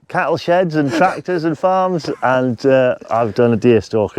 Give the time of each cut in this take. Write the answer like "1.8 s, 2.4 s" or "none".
none